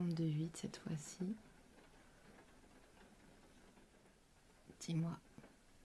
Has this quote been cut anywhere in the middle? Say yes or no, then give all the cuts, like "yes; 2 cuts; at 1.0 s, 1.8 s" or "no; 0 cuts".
yes; 1 cut; at 4.1 s